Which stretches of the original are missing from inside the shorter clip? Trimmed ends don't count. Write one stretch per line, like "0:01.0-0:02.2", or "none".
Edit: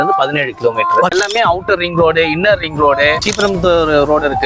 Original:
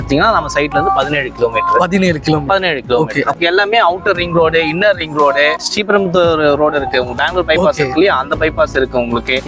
0:01.9-0:03.5
0:05.6-0:05.8